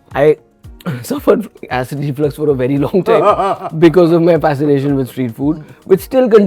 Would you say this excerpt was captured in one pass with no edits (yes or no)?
no